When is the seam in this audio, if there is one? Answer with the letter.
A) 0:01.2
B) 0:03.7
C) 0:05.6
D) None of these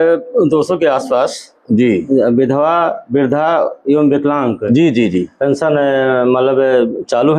D